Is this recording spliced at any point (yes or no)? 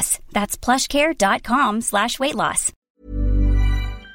yes